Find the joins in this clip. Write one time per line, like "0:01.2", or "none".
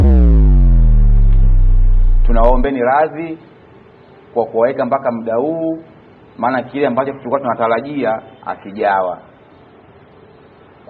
none